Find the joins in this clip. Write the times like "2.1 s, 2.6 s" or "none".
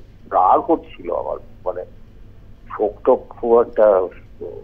none